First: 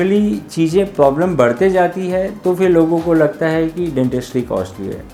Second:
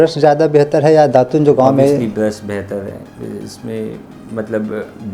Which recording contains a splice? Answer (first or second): second